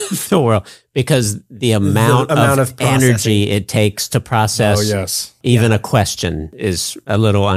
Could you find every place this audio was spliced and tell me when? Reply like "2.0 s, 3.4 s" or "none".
5.4 s, 6.7 s